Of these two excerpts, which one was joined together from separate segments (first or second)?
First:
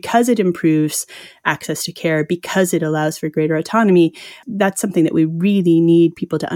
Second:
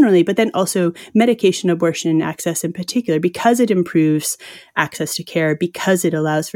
first